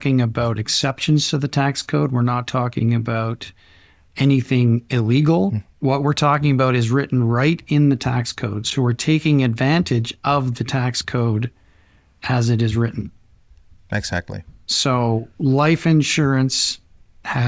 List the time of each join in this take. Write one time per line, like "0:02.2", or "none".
0:04.0
0:05.7